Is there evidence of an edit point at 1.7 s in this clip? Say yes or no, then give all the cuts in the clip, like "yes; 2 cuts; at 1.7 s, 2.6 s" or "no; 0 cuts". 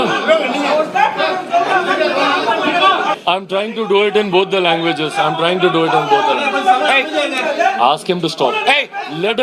no; 1 cut; at 3.2 s